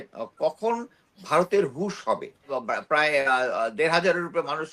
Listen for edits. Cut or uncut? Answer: cut